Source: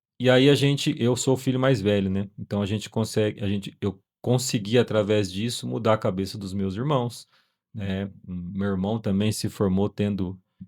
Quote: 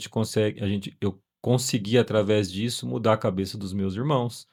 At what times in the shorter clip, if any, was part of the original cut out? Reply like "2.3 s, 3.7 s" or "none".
none